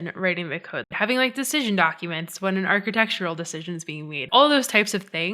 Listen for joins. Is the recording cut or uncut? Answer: cut